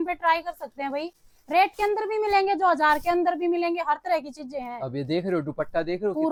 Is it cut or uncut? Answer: uncut